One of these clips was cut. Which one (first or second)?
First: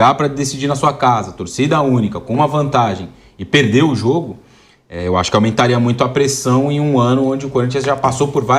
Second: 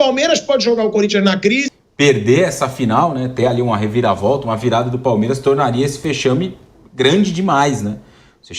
second